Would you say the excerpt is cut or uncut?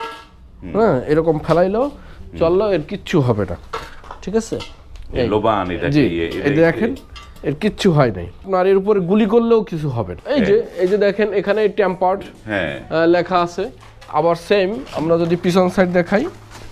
cut